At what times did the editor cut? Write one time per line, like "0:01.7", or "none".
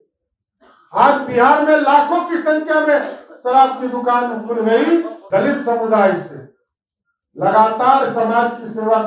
0:05.2